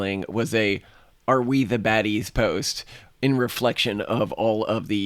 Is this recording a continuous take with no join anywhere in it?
yes; 0 cuts

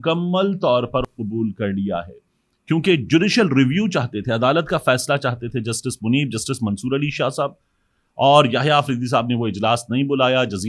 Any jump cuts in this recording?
no; 0 cuts

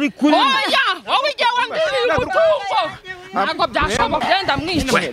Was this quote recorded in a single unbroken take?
no; 1 cut; at 4.2 s

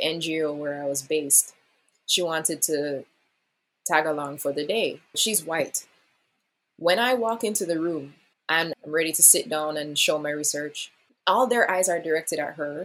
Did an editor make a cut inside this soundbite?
no; 0 cuts

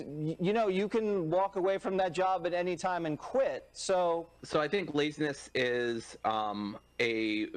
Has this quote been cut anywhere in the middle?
yes; 1 cut; at 4.4 s

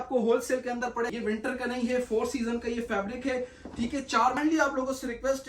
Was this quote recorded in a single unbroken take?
no; 2 cuts; at 1.1 s, 4.4 s

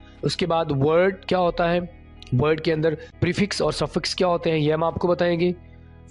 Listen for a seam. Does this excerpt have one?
yes; 1 cut; at 3.1 s

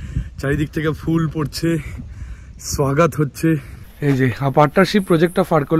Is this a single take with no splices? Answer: no; 1 cut; at 3.7 s

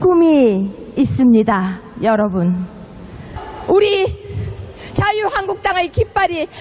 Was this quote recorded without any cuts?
no; 1 cut; at 3.2 s

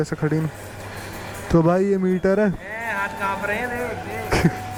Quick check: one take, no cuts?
yes; 0 cuts

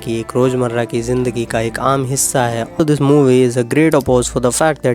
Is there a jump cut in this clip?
yes; 1 cut; at 2.8 s

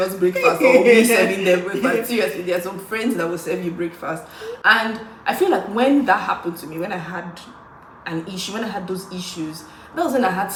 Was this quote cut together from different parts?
no; 0 cuts

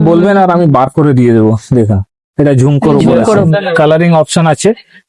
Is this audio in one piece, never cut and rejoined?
no; 1 cut; at 3.5 s

